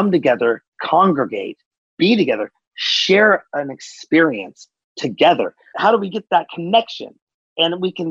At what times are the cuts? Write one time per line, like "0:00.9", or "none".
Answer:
0:05.6